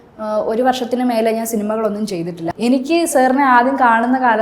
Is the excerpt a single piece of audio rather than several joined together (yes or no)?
no